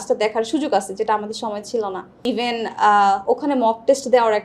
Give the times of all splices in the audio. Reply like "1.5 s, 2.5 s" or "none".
2.1 s